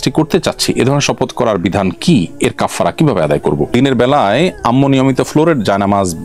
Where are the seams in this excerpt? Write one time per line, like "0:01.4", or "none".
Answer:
0:03.7